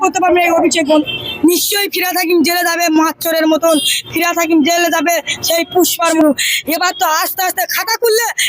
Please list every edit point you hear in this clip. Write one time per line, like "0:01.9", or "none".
0:01.0
0:06.2